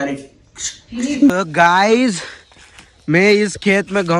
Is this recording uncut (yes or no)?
no